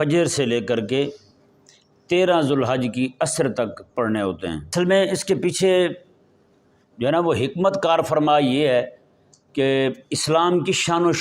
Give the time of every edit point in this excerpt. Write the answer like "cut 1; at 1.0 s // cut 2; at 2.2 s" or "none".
cut 1; at 4.7 s